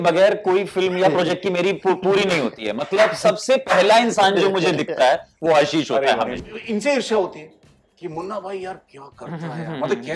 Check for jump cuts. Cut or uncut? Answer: cut